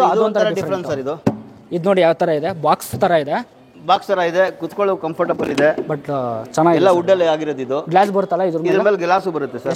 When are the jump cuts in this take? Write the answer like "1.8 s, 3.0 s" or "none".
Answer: none